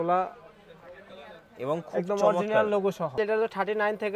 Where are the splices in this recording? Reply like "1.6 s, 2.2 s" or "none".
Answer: 3.2 s